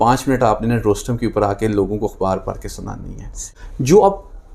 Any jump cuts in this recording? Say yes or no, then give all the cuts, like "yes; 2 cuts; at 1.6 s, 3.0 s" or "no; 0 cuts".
yes; 1 cut; at 3.5 s